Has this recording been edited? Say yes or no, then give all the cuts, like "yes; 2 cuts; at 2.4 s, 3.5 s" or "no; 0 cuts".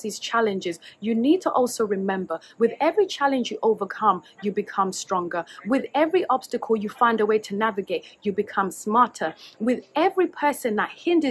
no; 0 cuts